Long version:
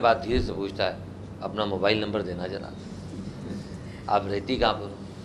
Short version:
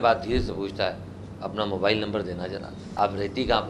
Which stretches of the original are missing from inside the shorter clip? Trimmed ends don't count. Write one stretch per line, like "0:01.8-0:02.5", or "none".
0:02.8-0:03.9